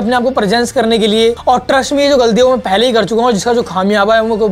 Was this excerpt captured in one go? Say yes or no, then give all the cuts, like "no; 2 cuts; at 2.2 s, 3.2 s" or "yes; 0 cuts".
no; 1 cut; at 1.4 s